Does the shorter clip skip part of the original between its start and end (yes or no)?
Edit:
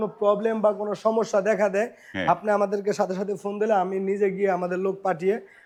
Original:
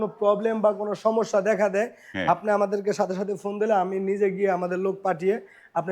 no